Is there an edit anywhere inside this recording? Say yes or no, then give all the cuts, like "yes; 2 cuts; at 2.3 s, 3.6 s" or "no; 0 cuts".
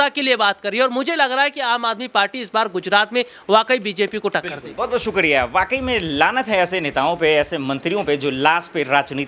no; 0 cuts